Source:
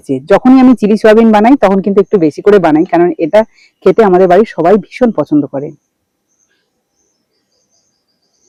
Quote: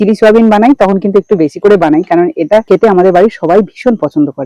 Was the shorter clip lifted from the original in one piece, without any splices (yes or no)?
no